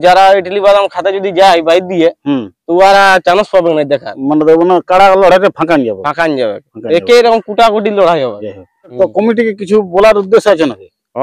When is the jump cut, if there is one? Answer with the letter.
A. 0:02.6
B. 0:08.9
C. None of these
B